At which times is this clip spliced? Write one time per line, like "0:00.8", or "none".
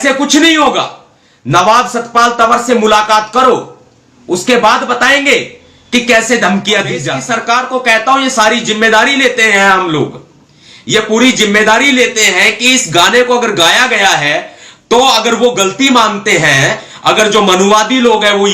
0:07.2

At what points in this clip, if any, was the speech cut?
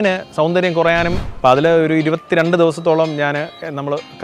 0:01.2

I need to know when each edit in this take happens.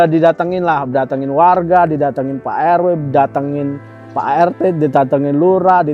none

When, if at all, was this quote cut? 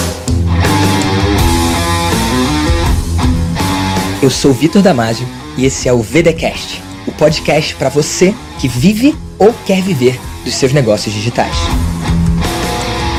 none

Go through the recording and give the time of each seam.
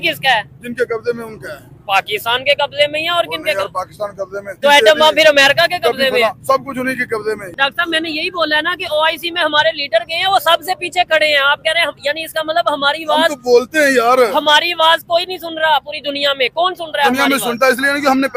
0:04.5
0:07.5

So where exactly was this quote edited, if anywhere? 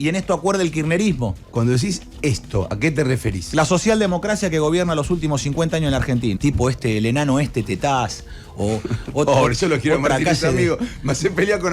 0:01.4
0:06.4

